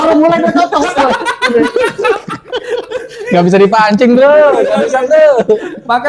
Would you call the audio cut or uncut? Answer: uncut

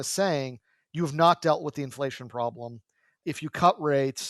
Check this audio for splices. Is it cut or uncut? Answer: cut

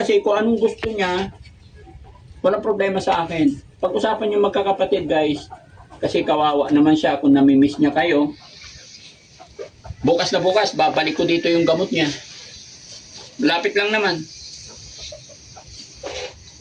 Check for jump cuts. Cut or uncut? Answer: uncut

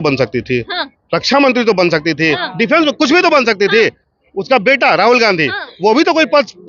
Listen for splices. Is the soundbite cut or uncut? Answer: uncut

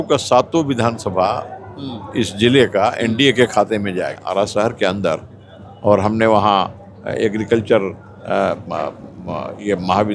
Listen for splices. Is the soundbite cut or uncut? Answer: cut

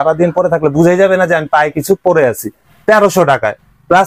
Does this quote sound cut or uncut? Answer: cut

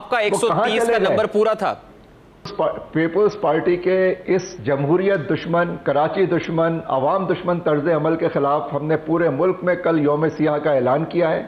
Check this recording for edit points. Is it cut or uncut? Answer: cut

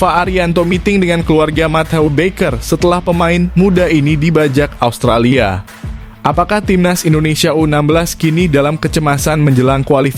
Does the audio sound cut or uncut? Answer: uncut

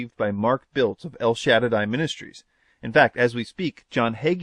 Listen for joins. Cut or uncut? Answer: uncut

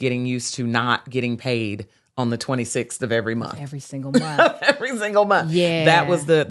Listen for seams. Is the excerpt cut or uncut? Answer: uncut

